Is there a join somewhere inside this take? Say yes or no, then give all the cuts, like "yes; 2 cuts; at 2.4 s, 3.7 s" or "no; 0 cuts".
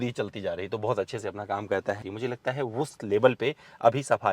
yes; 1 cut; at 2.0 s